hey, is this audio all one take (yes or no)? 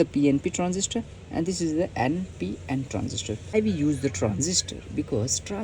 no